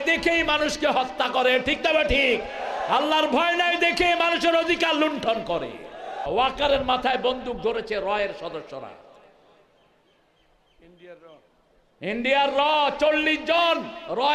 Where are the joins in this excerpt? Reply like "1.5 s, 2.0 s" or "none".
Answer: 6.2 s